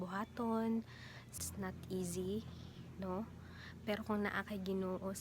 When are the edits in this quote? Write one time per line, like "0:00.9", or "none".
0:01.4